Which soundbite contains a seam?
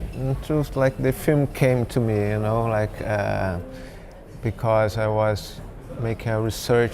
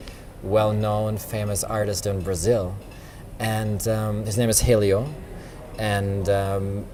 first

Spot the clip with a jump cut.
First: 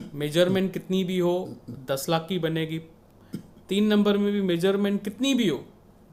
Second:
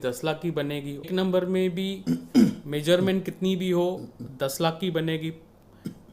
second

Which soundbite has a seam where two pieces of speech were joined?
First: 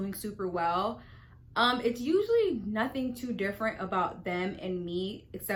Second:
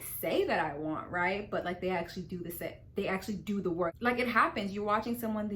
second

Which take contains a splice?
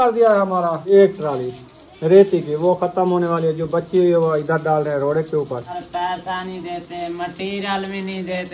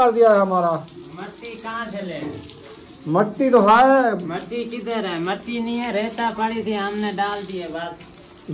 first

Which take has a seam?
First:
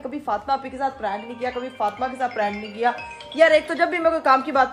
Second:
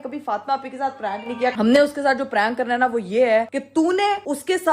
second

